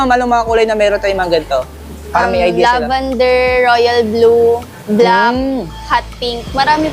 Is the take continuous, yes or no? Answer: yes